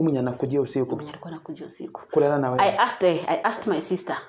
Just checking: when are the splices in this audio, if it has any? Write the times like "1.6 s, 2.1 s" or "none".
none